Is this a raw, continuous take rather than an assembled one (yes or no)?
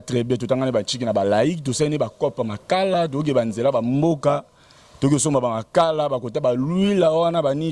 yes